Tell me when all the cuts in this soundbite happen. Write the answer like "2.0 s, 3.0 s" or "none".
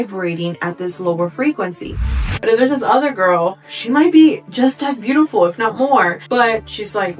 2.2 s, 6.2 s